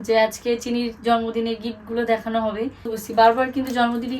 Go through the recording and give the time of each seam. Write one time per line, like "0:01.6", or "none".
0:03.0